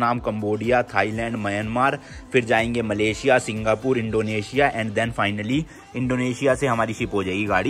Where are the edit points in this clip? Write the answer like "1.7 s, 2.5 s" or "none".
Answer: none